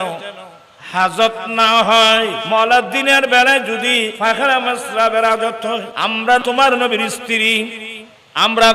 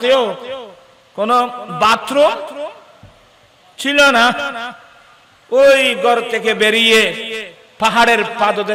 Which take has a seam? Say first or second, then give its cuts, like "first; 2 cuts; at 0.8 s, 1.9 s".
first; 3 cuts; at 2.4 s, 4.1 s, 6.3 s